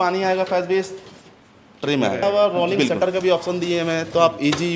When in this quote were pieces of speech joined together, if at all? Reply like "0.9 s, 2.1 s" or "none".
none